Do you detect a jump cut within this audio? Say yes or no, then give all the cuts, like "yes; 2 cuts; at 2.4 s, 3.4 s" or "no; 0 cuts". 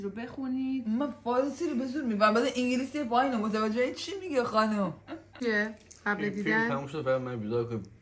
yes; 1 cut; at 5.3 s